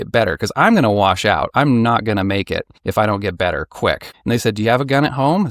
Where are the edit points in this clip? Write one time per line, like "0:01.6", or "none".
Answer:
0:02.8
0:04.1